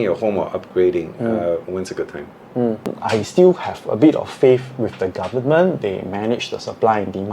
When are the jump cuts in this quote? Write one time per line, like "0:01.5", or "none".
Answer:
0:03.0